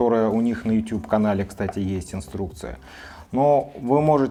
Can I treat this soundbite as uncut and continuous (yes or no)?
yes